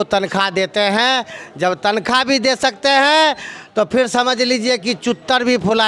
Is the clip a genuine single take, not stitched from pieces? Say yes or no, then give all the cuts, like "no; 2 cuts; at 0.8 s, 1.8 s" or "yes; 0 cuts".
yes; 0 cuts